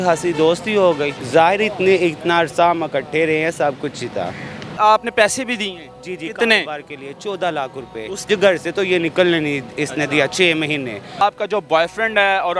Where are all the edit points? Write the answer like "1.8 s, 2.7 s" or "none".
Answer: 1.2 s, 4.7 s, 8.3 s, 11.2 s